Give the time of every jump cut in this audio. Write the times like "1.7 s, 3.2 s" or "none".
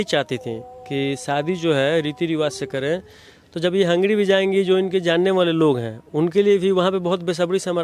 none